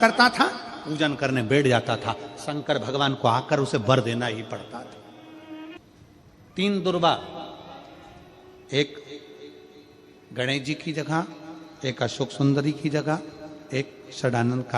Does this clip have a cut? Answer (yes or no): yes